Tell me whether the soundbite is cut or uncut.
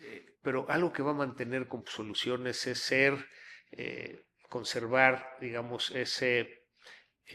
uncut